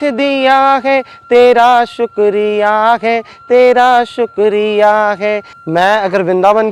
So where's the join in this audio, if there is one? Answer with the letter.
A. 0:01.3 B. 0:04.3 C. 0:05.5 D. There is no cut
C